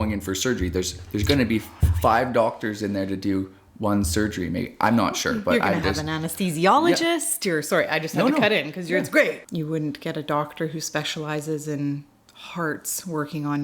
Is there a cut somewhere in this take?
yes; 1 cut; at 9.4 s

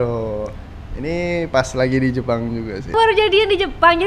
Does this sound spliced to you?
yes; 1 cut; at 2.8 s

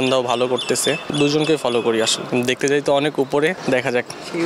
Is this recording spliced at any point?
yes; 3 cuts; at 1.1 s, 2.2 s, 3.6 s

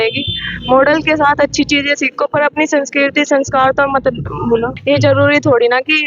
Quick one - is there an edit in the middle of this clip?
yes; 1 cut; at 4.7 s

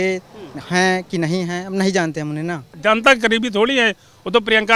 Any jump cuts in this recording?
yes; 1 cut; at 2.7 s

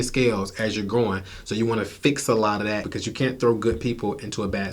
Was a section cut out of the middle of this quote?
yes; 1 cut; at 2.9 s

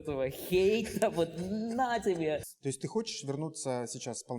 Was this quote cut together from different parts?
yes; 1 cut; at 2.4 s

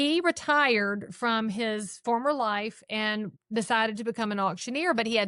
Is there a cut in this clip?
yes; 1 cut; at 3.4 s

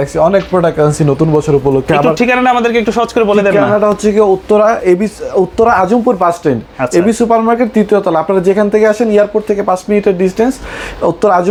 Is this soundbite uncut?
yes; 0 cuts

